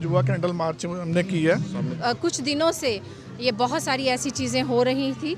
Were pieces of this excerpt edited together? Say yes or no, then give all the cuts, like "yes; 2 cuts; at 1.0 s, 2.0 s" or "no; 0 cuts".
yes; 1 cut; at 1.9 s